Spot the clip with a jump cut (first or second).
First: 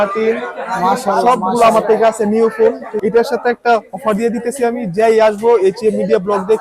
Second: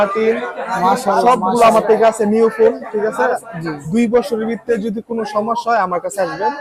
first